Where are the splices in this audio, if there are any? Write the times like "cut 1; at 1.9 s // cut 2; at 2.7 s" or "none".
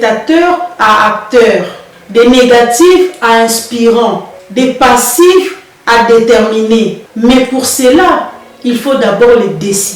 none